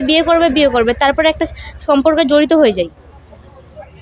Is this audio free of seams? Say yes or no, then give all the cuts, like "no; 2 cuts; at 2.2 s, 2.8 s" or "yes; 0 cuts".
yes; 0 cuts